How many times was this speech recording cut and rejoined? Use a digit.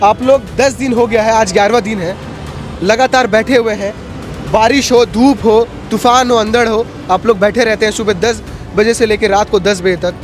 0